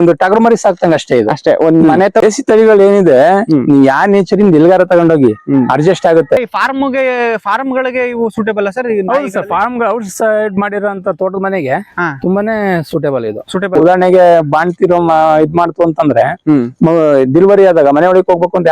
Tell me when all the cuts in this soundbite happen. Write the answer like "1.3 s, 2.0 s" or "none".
2.2 s, 6.5 s, 13.8 s

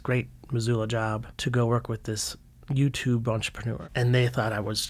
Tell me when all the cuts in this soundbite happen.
3.8 s

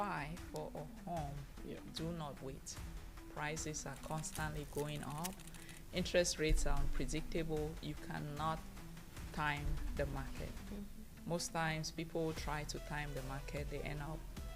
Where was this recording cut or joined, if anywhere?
none

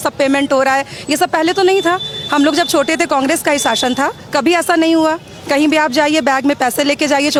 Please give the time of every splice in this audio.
none

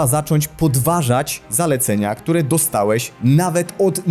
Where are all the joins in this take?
none

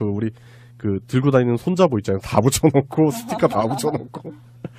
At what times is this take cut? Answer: none

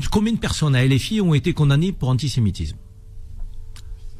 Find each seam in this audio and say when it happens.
none

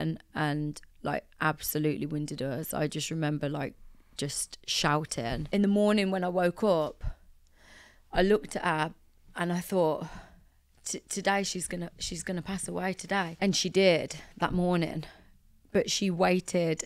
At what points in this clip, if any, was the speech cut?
5.4 s, 13.3 s

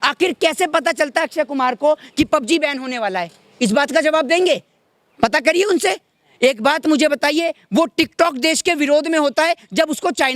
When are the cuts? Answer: none

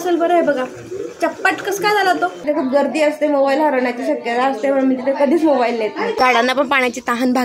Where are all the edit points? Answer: 2.4 s, 6.1 s

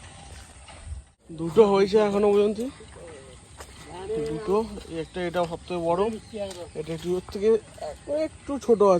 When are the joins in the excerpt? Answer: 1.2 s

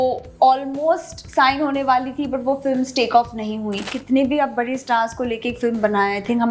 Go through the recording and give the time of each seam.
3.9 s

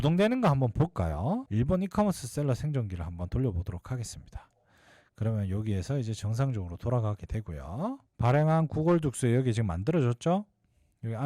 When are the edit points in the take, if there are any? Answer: 1.4 s, 8.1 s

